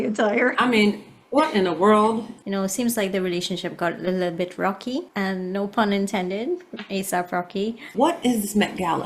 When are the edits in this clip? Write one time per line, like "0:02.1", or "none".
0:02.4
0:05.1
0:07.9